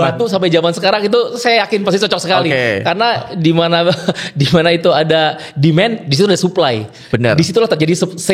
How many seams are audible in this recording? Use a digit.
0